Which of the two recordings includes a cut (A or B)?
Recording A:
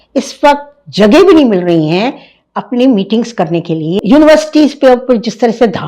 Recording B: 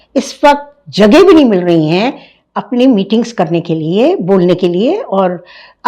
A